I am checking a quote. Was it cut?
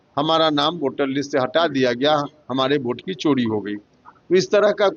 no; 0 cuts

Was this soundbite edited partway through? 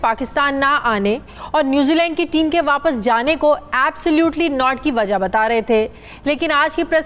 no; 0 cuts

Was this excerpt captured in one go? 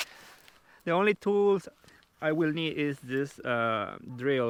yes; 0 cuts

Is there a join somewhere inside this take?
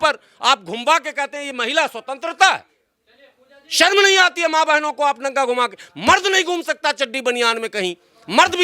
no; 0 cuts

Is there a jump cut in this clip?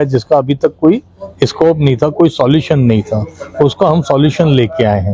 no; 0 cuts

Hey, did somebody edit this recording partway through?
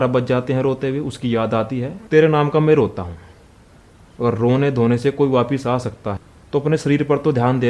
yes; 2 cuts; at 1.9 s, 6.1 s

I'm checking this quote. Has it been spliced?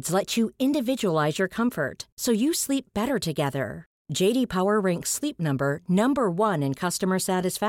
no; 0 cuts

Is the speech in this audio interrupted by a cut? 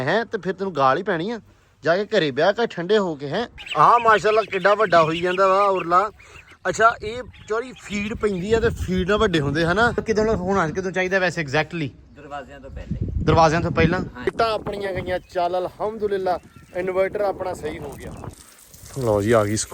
yes; 4 cuts; at 3.6 s, 10.0 s, 14.3 s, 18.5 s

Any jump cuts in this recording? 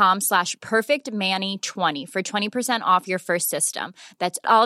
yes; 1 cut; at 2.0 s

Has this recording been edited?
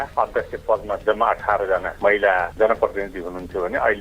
yes; 1 cut; at 1.0 s

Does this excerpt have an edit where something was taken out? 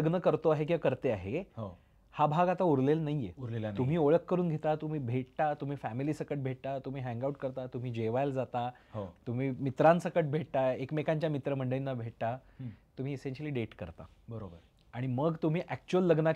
no; 0 cuts

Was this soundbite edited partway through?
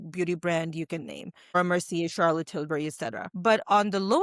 yes; 2 cuts; at 1.6 s, 3.2 s

